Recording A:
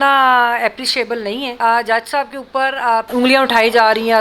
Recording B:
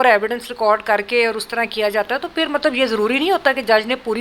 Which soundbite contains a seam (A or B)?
A